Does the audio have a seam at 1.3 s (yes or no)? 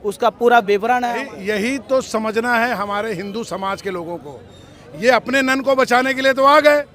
yes